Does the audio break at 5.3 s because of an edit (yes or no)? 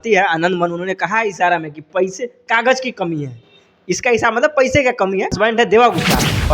yes